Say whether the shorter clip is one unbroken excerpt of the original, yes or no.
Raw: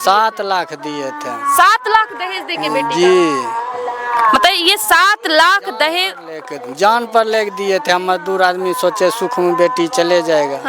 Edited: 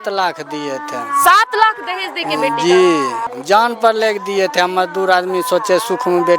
no